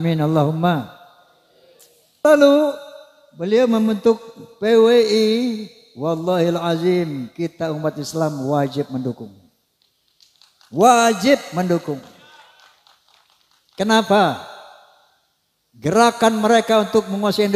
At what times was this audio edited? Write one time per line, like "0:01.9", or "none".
0:02.2